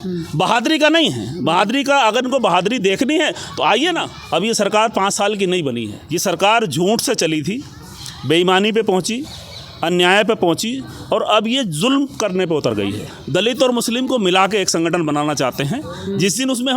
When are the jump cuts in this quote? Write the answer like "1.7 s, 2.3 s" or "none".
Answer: 4.2 s, 5.9 s, 13.1 s